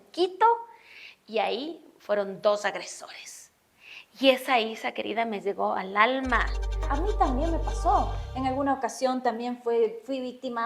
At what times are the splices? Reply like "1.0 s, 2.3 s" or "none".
6.9 s